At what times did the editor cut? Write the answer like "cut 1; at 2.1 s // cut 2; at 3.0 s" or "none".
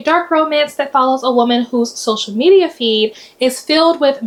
none